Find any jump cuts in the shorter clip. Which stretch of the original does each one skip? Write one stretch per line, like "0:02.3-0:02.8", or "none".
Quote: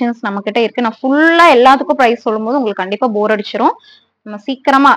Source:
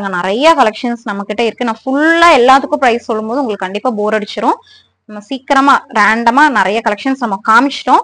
none